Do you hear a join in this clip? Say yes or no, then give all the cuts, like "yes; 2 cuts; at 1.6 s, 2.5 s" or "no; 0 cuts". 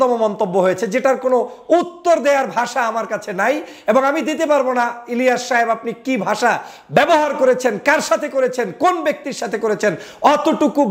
no; 0 cuts